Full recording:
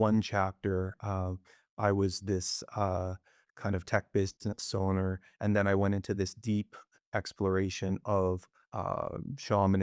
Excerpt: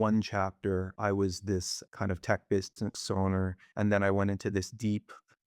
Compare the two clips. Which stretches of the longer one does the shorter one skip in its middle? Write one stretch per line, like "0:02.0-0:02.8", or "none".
0:00.9-0:01.7
0:02.6-0:03.4